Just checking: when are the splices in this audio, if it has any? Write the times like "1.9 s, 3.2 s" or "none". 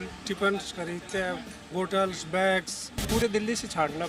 3.1 s